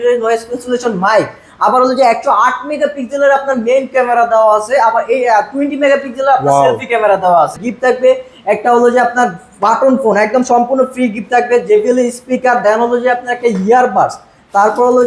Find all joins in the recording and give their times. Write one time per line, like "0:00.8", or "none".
0:07.6

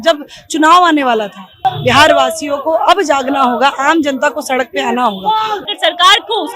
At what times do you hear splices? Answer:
0:01.5
0:05.6

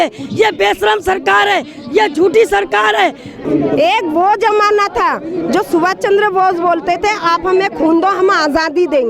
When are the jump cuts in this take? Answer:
0:03.4

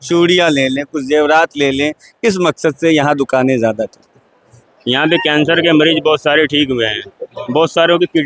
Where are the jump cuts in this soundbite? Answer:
0:04.6

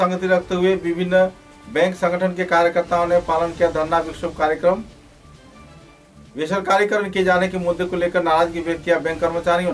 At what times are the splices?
none

